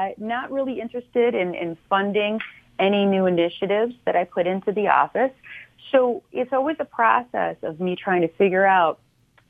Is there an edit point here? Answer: no; 0 cuts

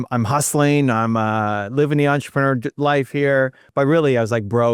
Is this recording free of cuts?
no; 1 cut; at 3.6 s

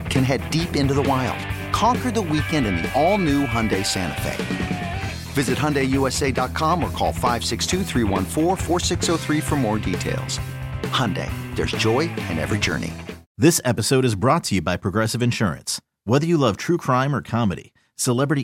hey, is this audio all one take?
no; 1 cut; at 13.3 s

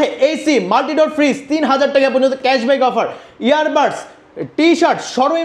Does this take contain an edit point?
no; 0 cuts

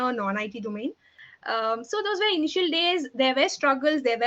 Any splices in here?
yes; 1 cut; at 1.1 s

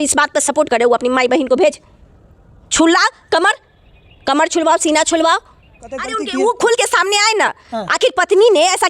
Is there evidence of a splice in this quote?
yes; 1 cut; at 6.2 s

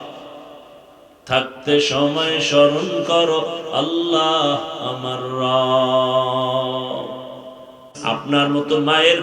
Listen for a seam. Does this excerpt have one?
yes; 1 cut; at 8.0 s

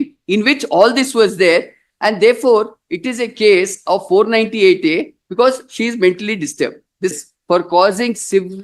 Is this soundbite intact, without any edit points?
no; 1 cut; at 7.1 s

